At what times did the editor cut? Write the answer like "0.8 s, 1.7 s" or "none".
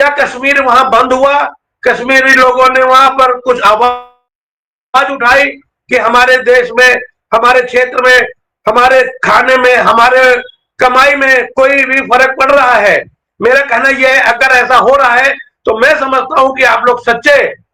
none